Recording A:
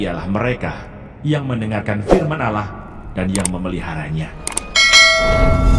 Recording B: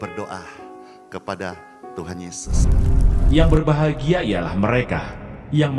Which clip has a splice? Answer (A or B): B